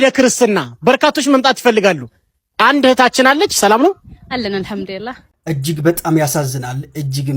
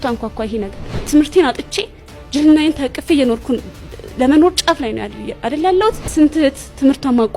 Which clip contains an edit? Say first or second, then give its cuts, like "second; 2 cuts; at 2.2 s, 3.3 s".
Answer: first; 1 cut; at 5.2 s